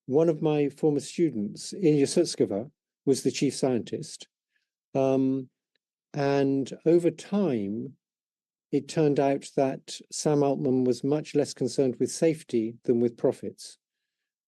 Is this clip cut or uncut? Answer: uncut